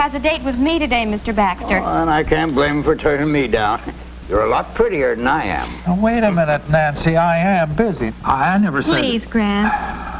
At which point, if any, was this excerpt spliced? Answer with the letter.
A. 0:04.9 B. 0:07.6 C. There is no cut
C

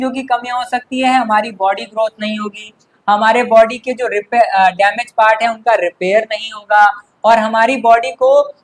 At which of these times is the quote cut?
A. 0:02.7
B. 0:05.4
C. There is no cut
C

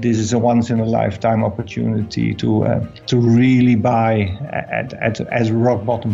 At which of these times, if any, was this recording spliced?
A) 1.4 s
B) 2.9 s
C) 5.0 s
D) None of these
B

